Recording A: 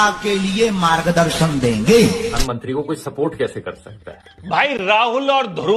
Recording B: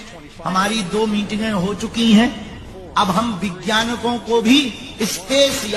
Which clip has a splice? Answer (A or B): A